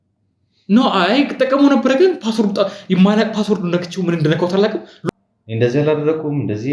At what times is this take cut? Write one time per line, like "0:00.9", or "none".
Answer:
0:04.9